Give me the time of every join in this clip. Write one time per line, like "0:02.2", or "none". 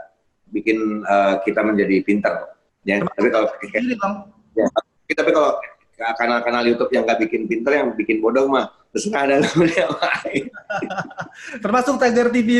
none

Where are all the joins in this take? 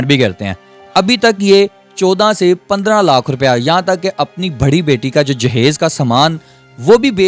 none

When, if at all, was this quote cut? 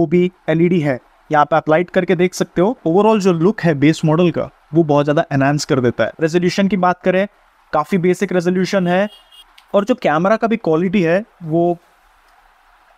0:02.8
0:06.1

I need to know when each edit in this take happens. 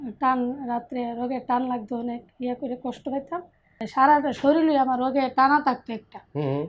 0:03.9

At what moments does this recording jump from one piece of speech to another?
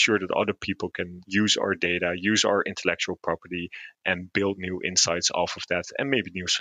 0:01.1

